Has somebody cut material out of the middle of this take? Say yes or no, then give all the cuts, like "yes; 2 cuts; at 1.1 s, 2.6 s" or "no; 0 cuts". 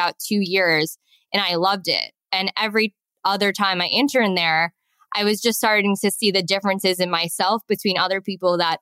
no; 0 cuts